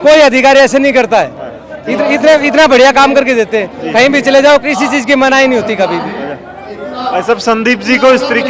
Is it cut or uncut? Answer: uncut